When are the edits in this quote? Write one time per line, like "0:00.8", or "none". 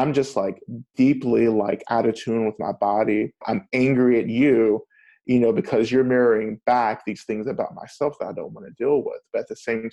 0:03.5

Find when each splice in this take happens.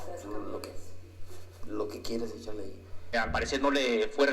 0:03.0

